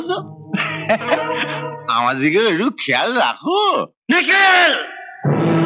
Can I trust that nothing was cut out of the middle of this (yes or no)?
no